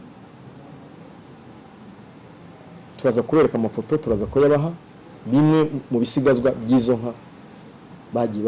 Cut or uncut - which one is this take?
uncut